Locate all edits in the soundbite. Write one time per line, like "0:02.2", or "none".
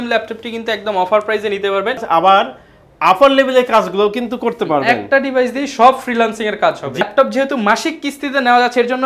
0:02.0
0:07.0